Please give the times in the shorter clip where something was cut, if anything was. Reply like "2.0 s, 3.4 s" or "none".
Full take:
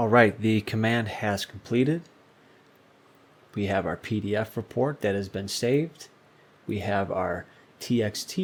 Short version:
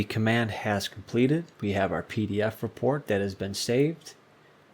1.5 s